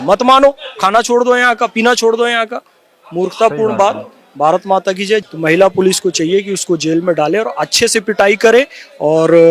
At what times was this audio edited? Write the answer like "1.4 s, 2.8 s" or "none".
5.3 s